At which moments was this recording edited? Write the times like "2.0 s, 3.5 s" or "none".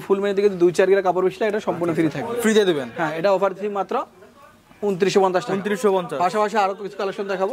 none